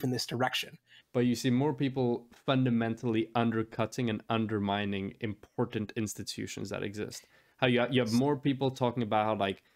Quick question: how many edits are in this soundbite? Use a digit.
1